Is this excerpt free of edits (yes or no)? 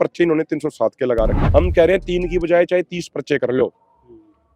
no